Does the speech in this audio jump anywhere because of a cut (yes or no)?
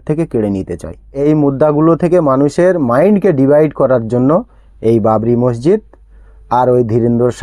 yes